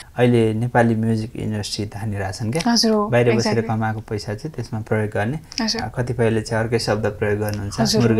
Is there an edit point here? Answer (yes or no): no